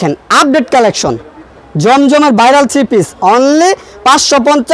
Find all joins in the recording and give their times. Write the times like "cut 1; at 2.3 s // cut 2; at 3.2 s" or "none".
none